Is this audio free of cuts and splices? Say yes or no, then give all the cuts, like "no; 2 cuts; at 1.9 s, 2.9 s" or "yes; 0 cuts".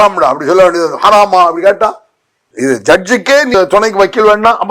no; 1 cut; at 3.5 s